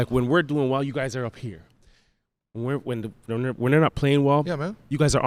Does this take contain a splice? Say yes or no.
no